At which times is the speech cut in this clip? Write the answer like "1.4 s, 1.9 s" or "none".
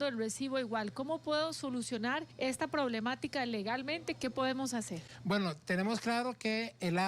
2.3 s